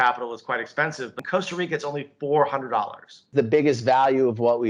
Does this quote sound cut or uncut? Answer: cut